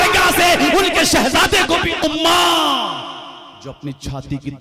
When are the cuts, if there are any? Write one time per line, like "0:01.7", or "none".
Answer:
0:02.0